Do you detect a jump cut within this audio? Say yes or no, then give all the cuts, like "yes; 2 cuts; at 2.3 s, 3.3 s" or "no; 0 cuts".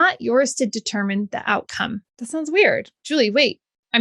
yes; 1 cut; at 2.1 s